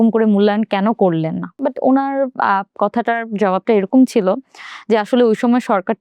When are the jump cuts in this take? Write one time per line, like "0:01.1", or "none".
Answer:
0:01.5

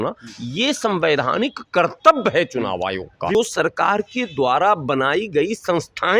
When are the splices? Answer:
0:03.4

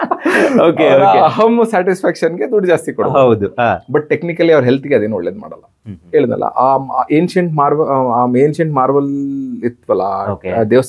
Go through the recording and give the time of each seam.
none

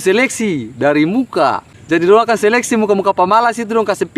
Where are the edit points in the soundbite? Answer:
0:01.7

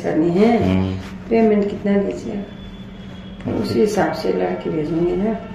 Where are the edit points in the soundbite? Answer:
none

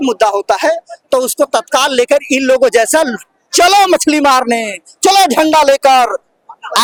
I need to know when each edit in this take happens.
none

